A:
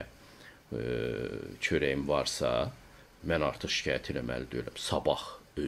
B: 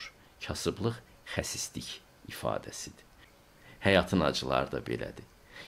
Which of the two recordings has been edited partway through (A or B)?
B